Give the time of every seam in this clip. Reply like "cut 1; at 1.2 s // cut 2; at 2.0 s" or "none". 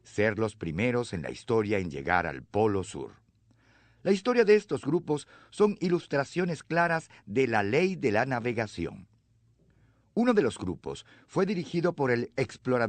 cut 1; at 6.3 s